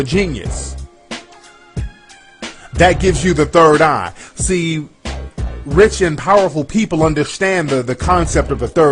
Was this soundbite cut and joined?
yes; 1 cut; at 3.5 s

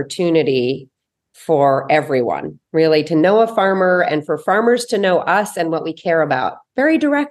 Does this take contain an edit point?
no; 0 cuts

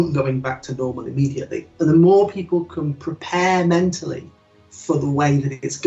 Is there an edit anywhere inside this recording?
no; 0 cuts

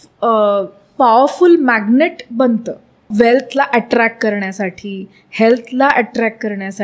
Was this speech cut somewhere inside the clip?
yes; 1 cut; at 3.1 s

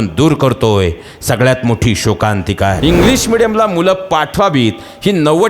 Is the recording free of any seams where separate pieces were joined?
no; 1 cut; at 2.8 s

